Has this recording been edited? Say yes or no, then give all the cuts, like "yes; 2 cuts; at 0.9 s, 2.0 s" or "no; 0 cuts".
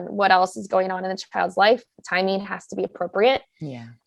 no; 0 cuts